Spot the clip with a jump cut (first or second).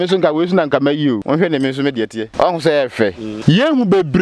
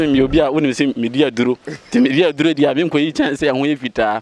first